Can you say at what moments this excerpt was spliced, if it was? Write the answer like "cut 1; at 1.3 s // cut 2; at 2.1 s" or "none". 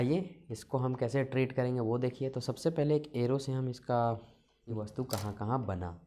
cut 1; at 4.8 s